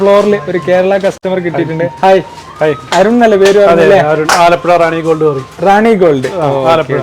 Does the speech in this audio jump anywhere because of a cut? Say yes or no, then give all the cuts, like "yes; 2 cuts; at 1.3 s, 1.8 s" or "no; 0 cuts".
yes; 1 cut; at 1.2 s